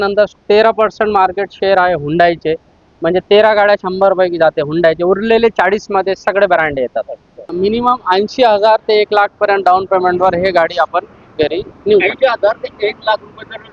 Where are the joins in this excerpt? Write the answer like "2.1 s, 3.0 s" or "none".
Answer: 7.5 s